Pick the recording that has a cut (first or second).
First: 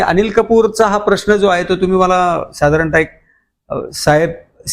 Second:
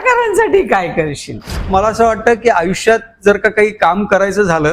second